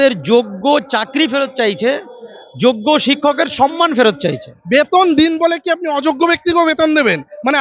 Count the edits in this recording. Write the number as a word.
one